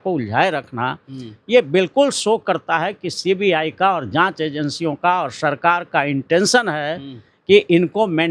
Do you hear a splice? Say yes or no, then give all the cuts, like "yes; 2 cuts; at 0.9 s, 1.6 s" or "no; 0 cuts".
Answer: no; 0 cuts